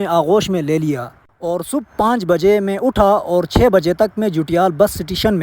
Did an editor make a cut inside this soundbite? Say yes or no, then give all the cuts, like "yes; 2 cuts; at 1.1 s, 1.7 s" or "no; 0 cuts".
no; 0 cuts